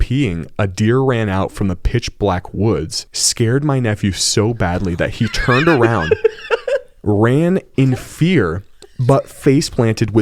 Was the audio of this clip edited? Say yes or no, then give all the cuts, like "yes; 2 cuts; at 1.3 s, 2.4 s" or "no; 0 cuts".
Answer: no; 0 cuts